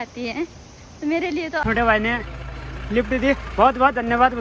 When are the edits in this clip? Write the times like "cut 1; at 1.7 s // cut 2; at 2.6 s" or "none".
cut 1; at 1.6 s